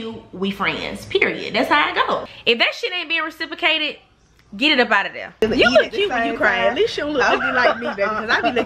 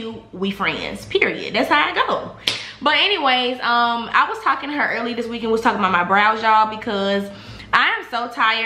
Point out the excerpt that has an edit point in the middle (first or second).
first